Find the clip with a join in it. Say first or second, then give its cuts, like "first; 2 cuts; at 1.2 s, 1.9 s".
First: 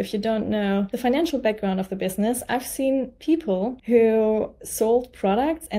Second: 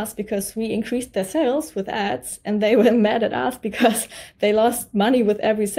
first; 2 cuts; at 0.9 s, 3.8 s